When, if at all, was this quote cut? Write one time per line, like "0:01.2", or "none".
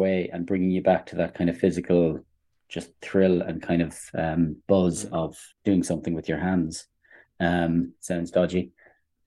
0:05.4